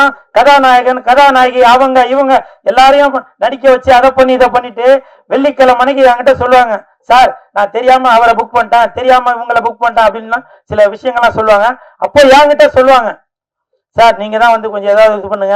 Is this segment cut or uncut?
uncut